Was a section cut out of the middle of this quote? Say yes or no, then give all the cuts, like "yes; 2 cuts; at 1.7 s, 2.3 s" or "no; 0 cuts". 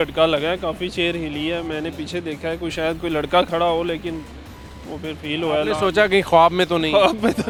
no; 0 cuts